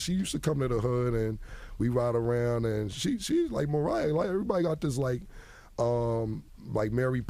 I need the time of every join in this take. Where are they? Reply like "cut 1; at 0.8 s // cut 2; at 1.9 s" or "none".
cut 1; at 2.9 s